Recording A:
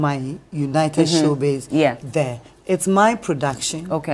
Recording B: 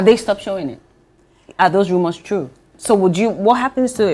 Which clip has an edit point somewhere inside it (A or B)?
B